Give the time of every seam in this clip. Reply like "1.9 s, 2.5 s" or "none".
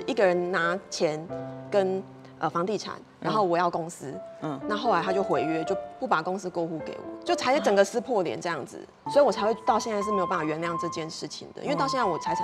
9.1 s